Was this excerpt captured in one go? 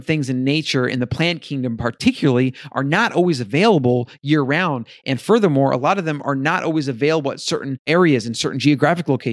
no; 1 cut; at 7.8 s

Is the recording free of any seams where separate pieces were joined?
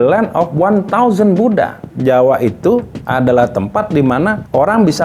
no; 1 cut; at 1.8 s

